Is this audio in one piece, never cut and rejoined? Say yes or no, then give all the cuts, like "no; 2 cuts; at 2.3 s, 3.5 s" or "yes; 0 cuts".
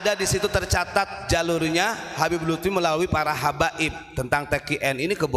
yes; 0 cuts